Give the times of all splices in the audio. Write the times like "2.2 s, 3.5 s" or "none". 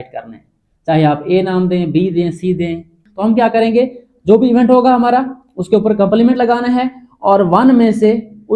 3.0 s